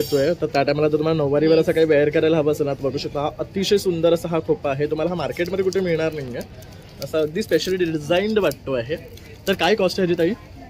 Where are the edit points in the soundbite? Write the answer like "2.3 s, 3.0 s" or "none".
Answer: none